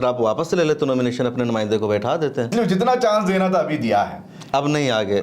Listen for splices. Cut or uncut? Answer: cut